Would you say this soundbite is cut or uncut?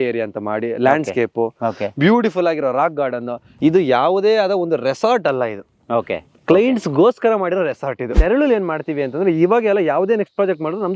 cut